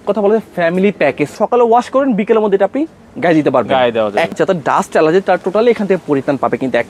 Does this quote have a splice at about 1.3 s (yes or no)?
yes